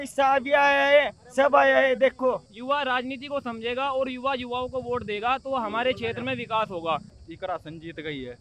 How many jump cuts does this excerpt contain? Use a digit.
2